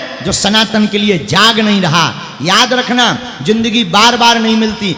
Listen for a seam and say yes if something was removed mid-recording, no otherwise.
no